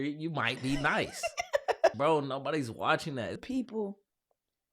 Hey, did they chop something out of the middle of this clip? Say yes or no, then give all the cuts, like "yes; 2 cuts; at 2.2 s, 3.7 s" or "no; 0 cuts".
yes; 2 cuts; at 1.9 s, 3.4 s